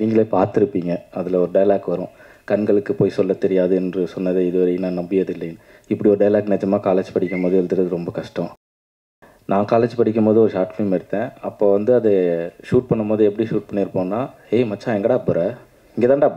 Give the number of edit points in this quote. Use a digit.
1